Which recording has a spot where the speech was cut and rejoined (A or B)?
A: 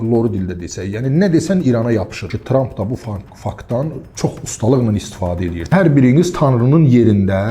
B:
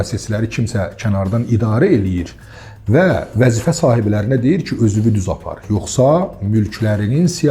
A